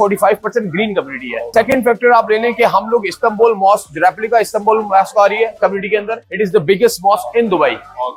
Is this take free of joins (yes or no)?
yes